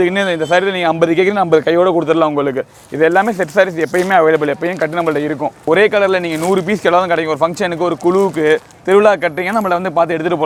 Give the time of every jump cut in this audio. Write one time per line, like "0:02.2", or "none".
none